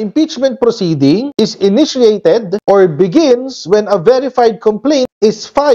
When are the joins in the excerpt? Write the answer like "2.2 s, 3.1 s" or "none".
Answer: none